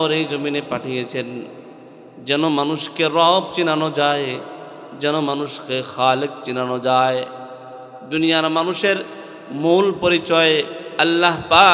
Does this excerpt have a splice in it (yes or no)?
no